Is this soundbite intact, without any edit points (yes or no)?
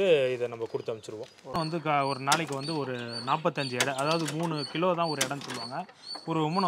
no